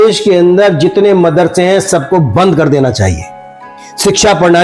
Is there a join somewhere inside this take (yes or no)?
no